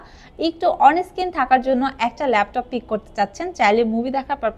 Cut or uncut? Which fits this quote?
uncut